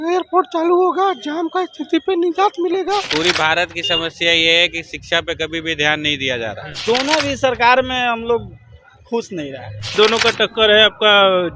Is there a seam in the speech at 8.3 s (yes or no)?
no